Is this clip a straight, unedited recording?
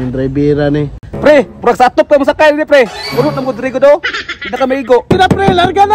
no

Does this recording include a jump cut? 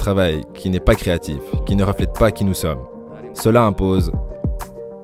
no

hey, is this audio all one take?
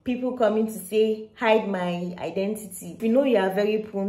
no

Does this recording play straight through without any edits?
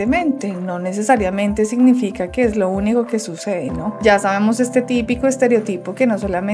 yes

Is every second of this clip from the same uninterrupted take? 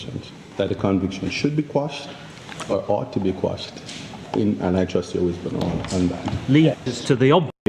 no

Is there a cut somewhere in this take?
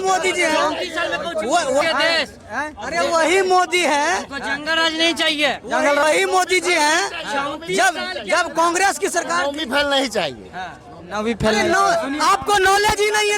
yes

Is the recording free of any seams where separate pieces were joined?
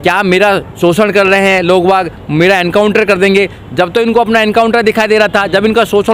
yes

